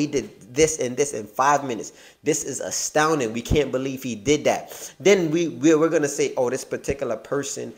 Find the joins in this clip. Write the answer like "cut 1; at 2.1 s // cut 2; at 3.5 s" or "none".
none

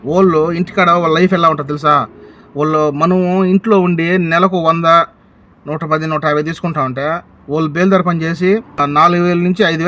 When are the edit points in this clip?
cut 1; at 8.8 s

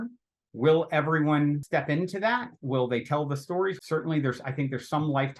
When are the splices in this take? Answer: cut 1; at 1.6 s // cut 2; at 3.8 s

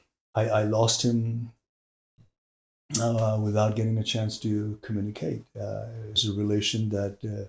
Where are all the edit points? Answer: cut 1; at 6.2 s

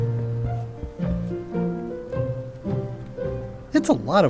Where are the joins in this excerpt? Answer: none

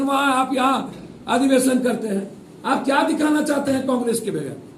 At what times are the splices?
none

